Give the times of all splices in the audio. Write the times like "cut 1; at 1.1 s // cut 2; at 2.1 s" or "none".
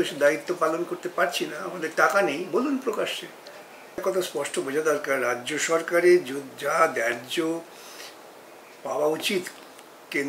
cut 1; at 4.0 s